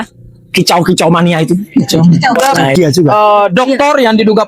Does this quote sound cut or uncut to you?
cut